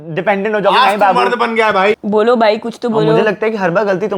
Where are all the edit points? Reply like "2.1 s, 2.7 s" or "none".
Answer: 2.0 s